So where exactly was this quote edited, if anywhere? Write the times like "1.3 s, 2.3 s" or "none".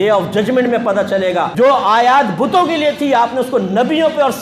1.5 s